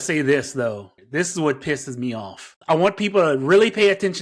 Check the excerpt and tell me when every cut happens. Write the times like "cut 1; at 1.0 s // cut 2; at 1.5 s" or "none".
cut 1; at 0.9 s // cut 2; at 2.6 s